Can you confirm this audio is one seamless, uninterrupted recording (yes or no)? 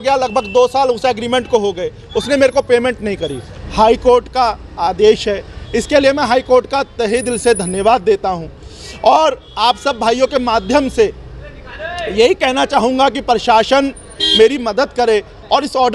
no